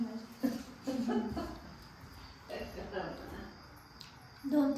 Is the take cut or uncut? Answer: uncut